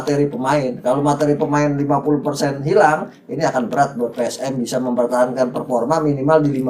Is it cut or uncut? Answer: uncut